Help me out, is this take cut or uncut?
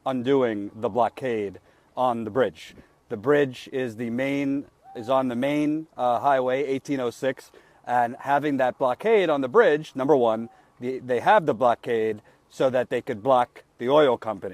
cut